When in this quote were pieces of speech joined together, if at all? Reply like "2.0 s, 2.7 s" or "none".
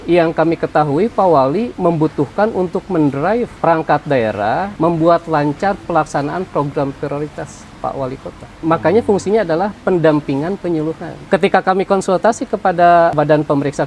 3.5 s, 4.7 s, 8.6 s, 11.1 s, 13.1 s